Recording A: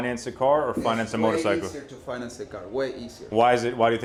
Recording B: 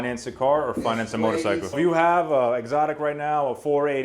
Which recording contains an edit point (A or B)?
B